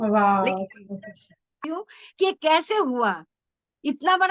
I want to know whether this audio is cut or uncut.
cut